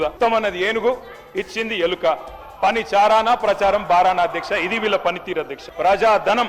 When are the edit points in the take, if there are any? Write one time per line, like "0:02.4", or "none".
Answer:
0:05.6